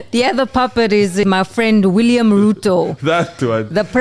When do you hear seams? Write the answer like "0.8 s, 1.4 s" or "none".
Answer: 1.2 s